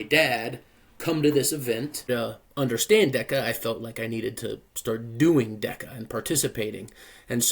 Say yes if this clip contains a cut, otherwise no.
yes